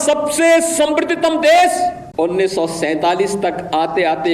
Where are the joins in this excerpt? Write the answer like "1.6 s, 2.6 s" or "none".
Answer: 2.0 s